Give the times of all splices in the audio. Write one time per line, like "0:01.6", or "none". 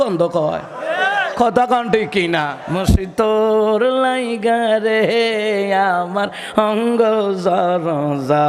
0:02.6